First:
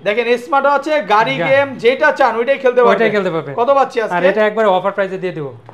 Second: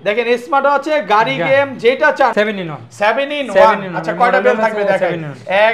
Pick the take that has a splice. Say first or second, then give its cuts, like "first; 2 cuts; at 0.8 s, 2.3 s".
second; 1 cut; at 2.3 s